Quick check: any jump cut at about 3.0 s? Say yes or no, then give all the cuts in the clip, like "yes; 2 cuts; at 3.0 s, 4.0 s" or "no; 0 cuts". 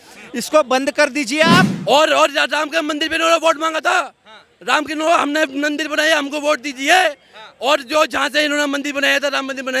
no; 1 cut; at 1.7 s